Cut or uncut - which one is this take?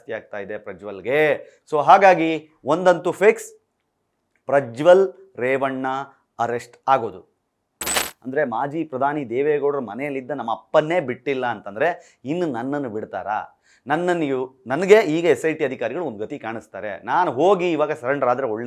cut